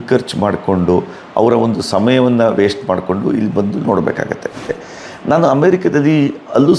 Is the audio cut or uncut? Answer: cut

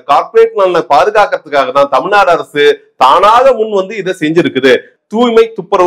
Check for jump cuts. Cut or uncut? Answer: cut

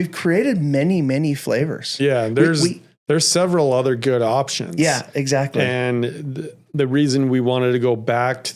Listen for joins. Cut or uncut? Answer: uncut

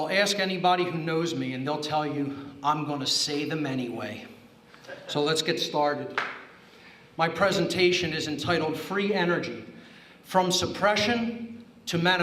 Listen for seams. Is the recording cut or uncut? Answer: cut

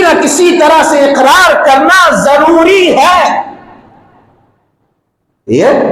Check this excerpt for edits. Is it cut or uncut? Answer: uncut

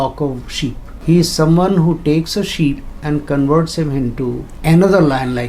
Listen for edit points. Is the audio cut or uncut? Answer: cut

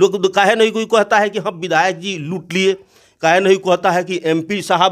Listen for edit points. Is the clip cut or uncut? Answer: uncut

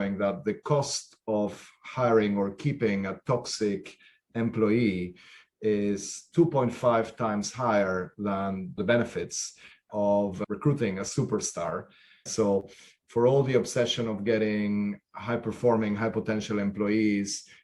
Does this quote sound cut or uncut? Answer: cut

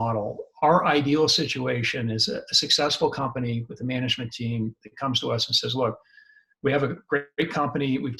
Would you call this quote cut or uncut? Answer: uncut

